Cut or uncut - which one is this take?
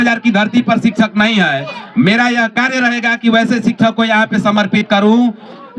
uncut